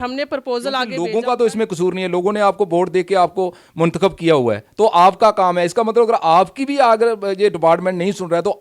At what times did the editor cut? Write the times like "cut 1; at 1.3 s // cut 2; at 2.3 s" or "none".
cut 1; at 0.9 s